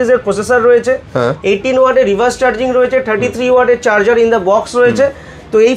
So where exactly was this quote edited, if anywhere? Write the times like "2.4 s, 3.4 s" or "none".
none